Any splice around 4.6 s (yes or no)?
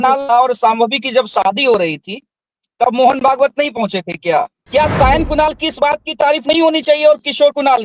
yes